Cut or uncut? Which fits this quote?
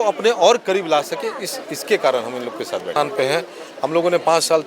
cut